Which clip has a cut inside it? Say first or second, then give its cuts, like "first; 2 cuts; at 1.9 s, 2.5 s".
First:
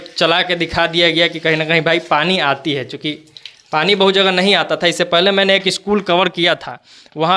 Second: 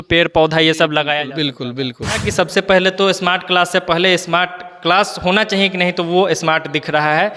second; 1 cut; at 2.2 s